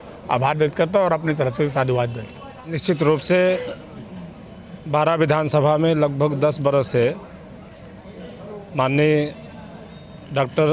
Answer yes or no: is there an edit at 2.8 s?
yes